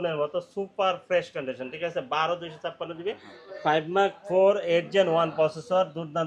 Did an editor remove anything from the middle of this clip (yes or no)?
yes